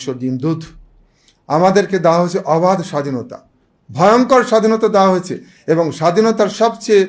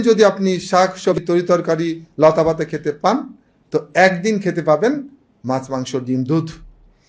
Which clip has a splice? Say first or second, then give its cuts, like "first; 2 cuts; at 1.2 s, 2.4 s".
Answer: second; 1 cut; at 1.2 s